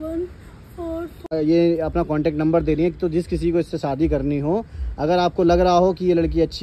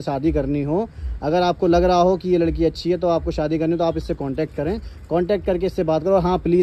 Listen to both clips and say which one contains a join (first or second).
first